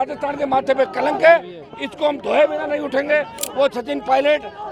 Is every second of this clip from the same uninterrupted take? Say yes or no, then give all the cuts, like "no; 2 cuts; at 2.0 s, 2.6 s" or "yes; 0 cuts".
no; 1 cut; at 3.4 s